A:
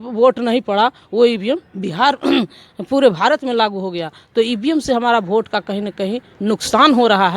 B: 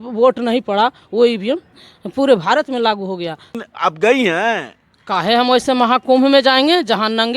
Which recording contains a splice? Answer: B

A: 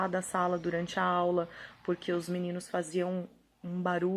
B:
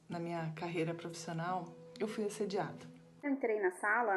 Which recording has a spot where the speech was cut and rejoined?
B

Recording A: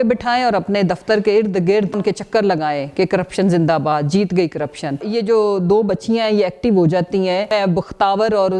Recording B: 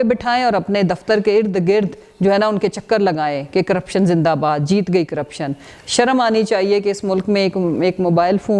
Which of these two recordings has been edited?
A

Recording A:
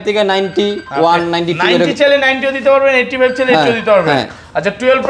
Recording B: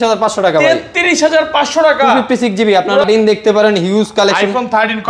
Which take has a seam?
B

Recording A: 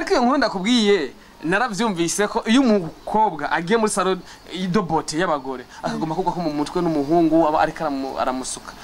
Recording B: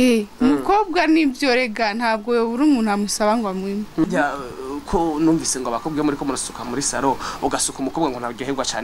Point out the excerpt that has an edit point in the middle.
B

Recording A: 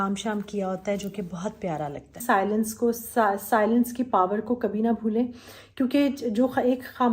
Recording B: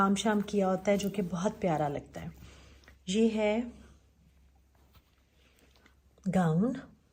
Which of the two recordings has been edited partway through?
A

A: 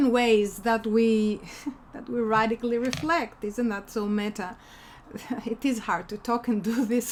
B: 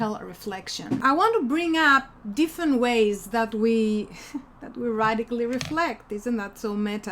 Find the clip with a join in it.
B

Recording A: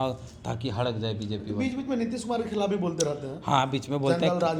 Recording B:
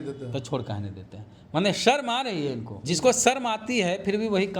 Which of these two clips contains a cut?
B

